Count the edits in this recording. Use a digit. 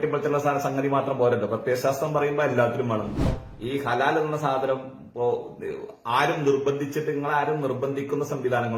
1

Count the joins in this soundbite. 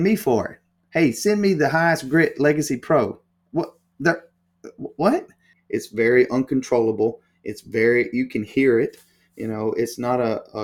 1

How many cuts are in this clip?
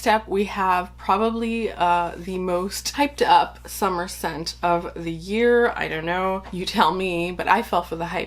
3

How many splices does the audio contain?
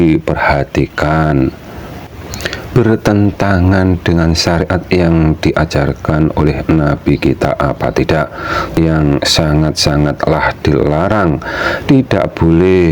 1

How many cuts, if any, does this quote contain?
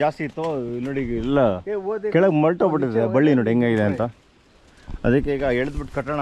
0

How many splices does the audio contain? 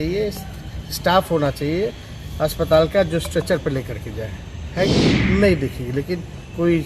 1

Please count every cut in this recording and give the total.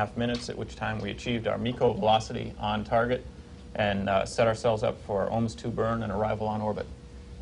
0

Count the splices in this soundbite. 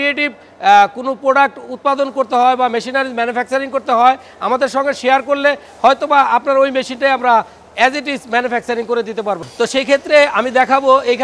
1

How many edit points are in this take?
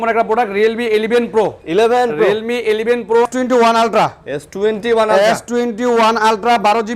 1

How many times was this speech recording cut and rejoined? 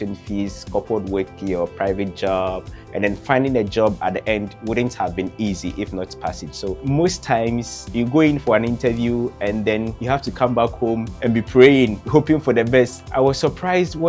6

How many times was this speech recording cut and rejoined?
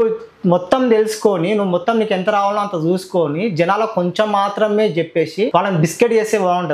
1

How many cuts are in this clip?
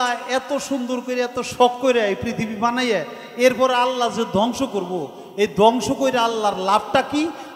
0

